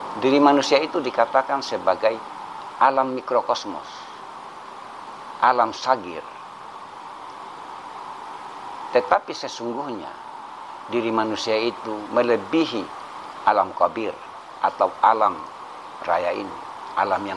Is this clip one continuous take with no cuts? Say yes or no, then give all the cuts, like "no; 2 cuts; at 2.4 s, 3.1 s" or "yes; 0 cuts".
yes; 0 cuts